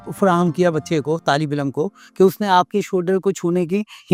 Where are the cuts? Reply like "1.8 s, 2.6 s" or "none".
none